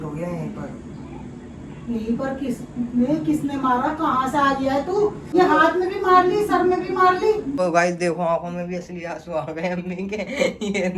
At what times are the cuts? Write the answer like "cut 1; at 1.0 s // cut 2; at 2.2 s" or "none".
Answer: cut 1; at 5.3 s // cut 2; at 7.6 s